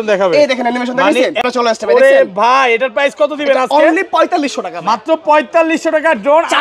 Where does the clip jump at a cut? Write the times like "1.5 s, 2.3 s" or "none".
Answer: none